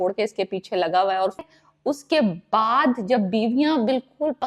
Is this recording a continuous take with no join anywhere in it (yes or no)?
no